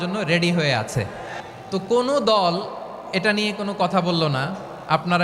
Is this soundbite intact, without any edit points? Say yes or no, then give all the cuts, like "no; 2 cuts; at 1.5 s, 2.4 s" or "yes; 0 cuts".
no; 1 cut; at 1.4 s